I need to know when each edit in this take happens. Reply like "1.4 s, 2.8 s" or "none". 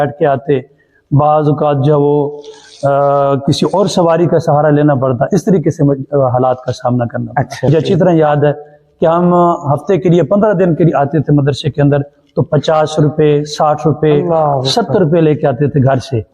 7.7 s